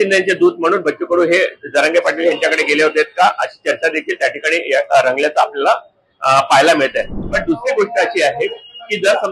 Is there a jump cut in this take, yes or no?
yes